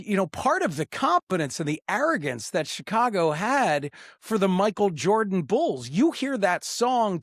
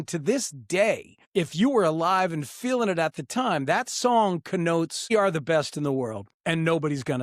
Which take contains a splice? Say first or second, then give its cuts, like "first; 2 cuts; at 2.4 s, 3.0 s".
second; 3 cuts; at 1.1 s, 5.1 s, 6.3 s